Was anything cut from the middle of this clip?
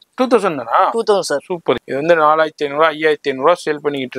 yes; 1 cut; at 1.9 s

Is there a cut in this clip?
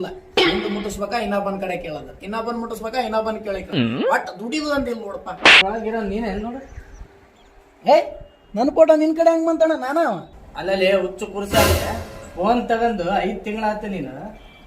yes; 1 cut; at 5.6 s

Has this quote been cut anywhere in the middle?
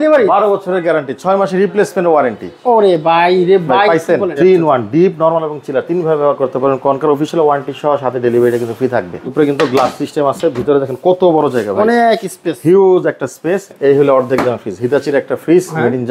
yes; 3 cuts; at 4.4 s, 9.2 s, 13.7 s

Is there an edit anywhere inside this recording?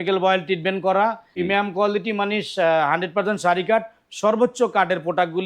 yes; 1 cut; at 1.3 s

